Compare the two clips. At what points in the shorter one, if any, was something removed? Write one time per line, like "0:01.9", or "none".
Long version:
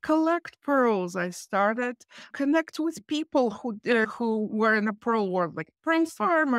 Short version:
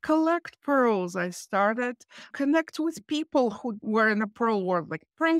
0:03.8